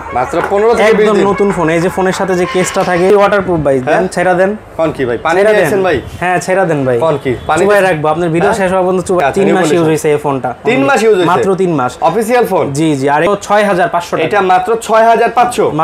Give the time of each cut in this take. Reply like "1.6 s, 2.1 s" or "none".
3.1 s, 9.2 s, 13.3 s